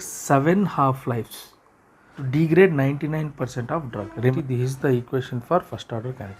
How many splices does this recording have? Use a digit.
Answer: 2